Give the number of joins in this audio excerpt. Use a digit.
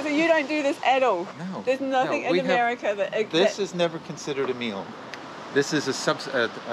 0